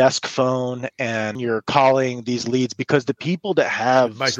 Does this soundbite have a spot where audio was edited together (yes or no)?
yes